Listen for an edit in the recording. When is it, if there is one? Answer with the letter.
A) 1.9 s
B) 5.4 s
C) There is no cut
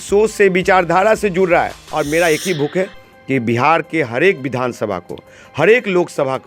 A